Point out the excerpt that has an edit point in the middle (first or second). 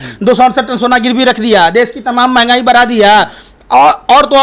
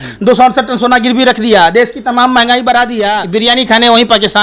second